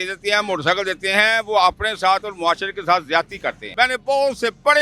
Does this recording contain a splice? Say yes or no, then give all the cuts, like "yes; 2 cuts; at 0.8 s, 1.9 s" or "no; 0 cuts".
yes; 1 cut; at 3.7 s